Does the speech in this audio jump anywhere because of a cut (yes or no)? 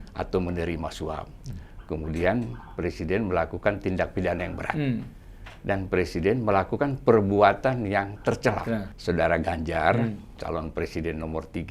yes